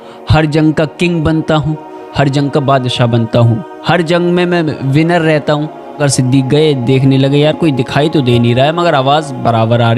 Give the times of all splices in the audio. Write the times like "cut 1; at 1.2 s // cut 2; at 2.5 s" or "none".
cut 1; at 6.0 s